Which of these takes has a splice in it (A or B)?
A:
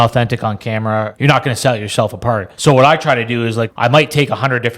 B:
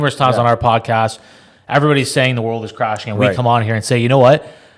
A